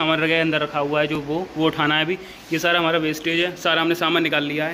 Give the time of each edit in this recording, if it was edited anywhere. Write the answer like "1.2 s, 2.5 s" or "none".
none